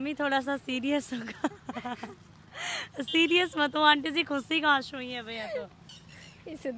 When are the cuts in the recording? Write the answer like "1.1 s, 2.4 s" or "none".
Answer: none